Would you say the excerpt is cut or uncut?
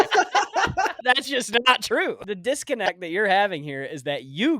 cut